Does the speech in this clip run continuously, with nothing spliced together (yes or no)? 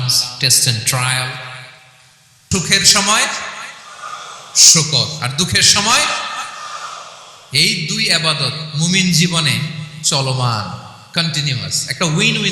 no